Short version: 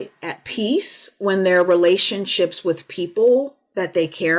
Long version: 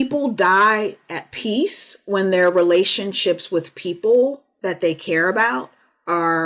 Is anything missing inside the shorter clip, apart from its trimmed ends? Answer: no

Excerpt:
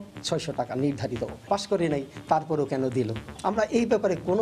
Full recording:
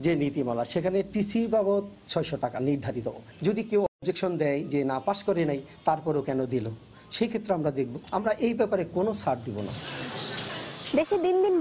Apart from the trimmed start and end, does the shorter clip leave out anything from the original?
yes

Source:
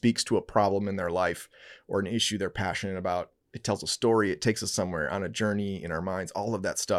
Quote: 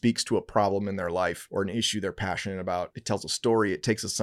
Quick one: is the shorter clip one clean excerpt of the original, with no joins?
no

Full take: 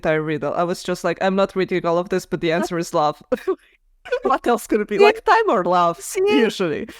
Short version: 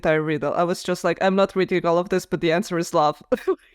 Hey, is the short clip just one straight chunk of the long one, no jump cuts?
yes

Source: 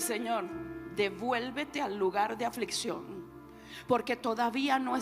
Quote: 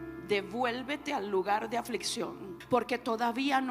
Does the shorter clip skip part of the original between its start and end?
yes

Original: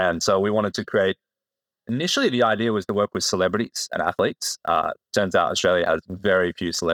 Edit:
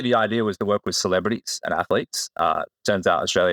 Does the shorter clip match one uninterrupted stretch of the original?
yes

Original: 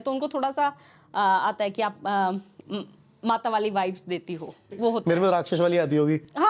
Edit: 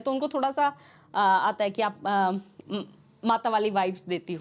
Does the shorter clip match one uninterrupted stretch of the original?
yes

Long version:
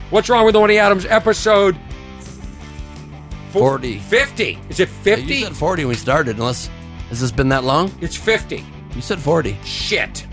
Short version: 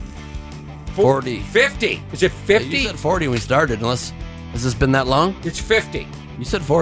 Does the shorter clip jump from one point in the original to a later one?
yes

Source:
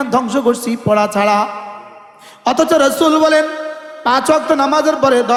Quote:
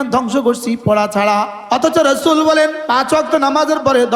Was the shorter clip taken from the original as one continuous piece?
no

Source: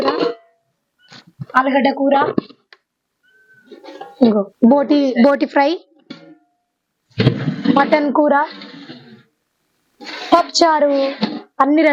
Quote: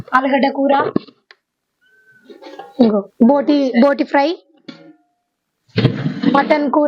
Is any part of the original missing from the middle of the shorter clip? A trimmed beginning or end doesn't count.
no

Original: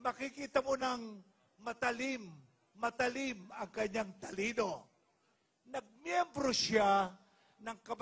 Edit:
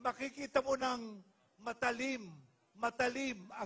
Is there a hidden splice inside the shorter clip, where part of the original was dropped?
no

